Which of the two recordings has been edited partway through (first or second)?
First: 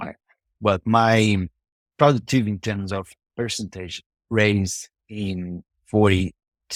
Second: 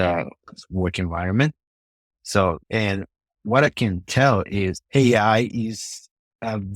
second